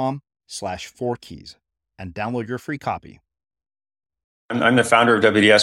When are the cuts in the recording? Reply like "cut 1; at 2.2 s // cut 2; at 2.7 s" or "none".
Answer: cut 1; at 4.5 s